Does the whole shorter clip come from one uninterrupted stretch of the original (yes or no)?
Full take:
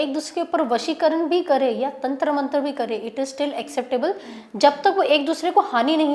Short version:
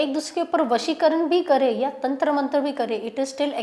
yes